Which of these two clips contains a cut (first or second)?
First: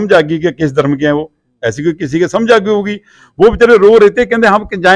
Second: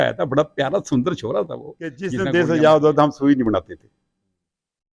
second